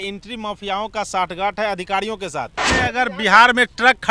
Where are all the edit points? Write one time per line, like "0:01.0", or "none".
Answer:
0:02.6

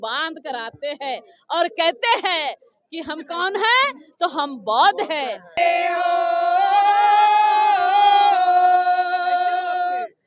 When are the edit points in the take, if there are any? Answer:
0:05.5

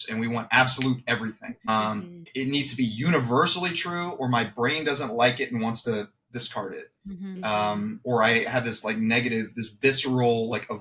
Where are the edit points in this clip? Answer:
none

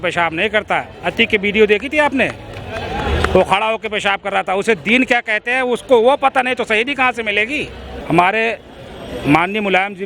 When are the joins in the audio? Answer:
0:07.9

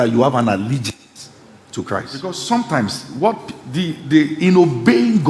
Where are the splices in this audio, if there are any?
0:02.4

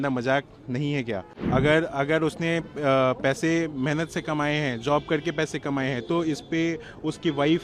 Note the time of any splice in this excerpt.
0:01.3

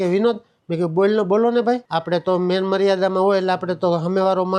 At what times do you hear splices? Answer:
none

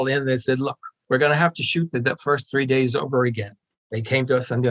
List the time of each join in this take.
0:03.6

